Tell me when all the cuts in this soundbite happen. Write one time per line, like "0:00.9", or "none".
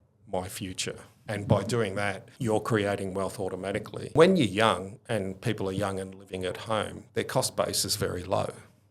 0:01.2
0:02.3
0:04.1